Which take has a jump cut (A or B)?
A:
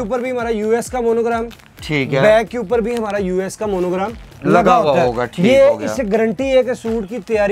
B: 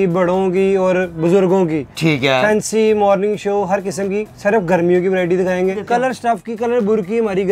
B